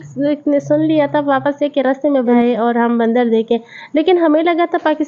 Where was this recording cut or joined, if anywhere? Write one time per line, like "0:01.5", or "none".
0:02.4